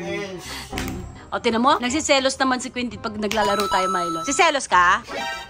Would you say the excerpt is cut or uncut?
cut